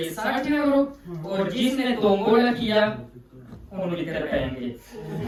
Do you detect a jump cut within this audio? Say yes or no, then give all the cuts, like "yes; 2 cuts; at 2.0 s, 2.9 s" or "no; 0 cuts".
no; 0 cuts